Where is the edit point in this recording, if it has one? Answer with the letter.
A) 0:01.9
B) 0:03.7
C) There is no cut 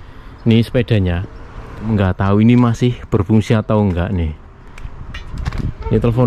A